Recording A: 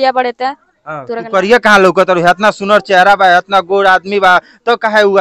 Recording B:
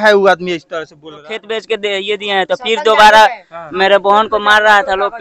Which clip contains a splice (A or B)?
B